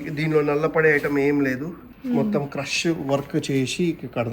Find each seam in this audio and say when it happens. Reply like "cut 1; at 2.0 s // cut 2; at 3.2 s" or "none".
cut 1; at 1.8 s